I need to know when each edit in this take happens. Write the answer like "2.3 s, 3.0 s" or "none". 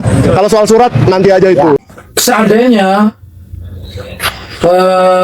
1.8 s